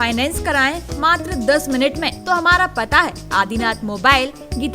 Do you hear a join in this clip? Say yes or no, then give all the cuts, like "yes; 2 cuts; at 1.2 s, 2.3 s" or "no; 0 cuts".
yes; 1 cut; at 2.2 s